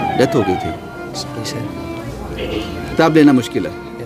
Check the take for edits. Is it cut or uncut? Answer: cut